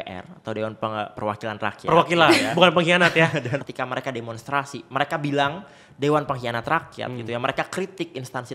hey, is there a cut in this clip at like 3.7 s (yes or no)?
yes